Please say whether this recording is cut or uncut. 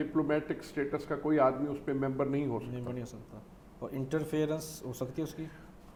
uncut